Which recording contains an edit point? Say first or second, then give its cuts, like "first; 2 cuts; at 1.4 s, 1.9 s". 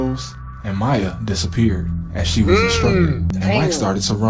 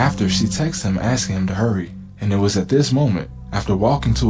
first; 1 cut; at 3.3 s